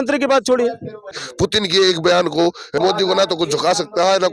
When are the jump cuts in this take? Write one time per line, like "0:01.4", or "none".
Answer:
0:01.2
0:02.8